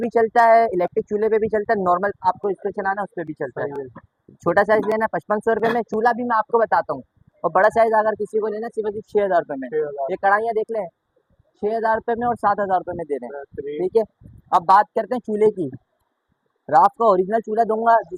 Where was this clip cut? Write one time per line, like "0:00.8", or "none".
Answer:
none